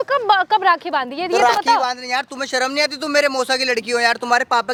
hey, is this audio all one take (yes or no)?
yes